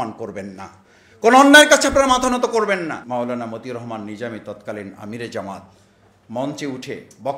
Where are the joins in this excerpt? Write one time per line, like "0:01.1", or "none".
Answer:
0:03.0